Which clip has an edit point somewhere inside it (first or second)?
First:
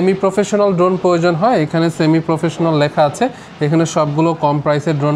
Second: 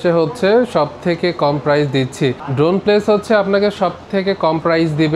second